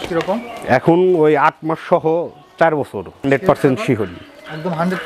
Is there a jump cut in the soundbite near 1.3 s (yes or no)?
no